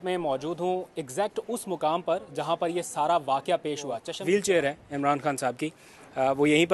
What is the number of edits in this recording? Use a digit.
1